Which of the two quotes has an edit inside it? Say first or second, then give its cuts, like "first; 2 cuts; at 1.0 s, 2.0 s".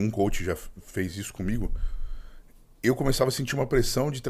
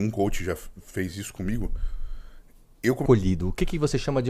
second; 1 cut; at 3.0 s